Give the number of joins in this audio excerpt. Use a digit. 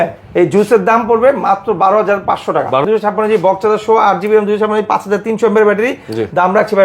1